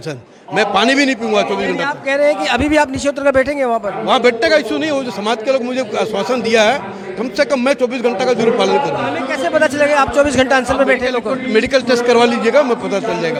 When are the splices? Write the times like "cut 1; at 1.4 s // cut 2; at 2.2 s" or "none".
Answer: none

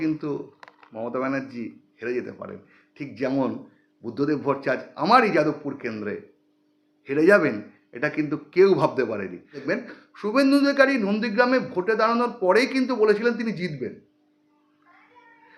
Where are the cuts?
cut 1; at 9.6 s

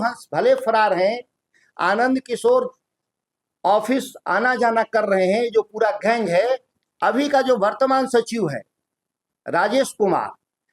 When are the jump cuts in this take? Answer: cut 1; at 6.8 s

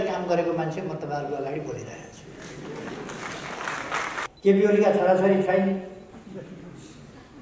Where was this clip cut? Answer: cut 1; at 4.2 s

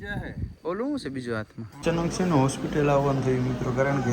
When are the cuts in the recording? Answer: cut 1; at 1.8 s

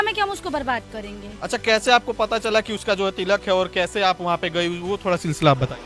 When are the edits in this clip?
cut 1; at 1.3 s

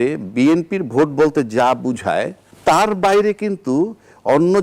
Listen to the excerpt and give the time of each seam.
cut 1; at 2.4 s

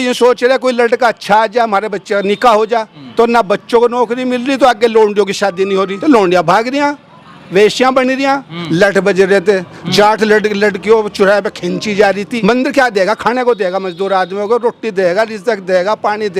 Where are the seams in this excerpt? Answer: cut 1; at 3.0 s // cut 2; at 5.9 s // cut 3; at 8.5 s // cut 4; at 12.3 s

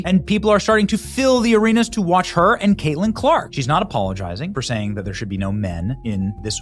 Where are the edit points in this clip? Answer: cut 1; at 3.5 s

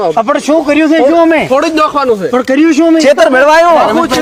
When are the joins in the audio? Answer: none

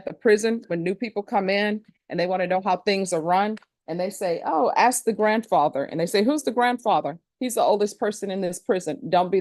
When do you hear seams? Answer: none

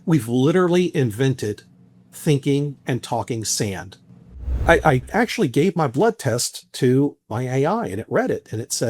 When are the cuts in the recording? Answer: cut 1; at 4.5 s

